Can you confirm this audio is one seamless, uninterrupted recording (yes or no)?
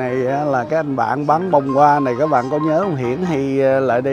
yes